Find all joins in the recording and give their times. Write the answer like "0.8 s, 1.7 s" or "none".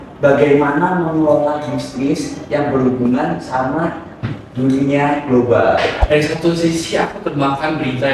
5.9 s